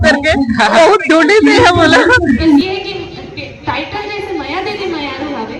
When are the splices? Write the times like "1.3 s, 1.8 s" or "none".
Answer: 2.6 s